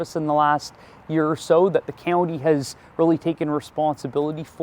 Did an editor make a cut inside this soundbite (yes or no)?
no